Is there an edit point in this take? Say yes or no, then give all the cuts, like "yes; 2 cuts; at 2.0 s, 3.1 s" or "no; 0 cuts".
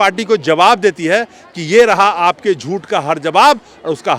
no; 0 cuts